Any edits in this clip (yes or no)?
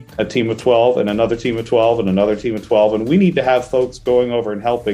no